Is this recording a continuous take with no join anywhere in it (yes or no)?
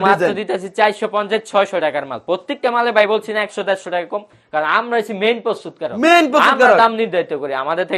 yes